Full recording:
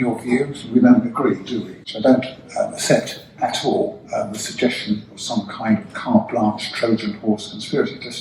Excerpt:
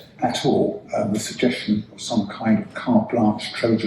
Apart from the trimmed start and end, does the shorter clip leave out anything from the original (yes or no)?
no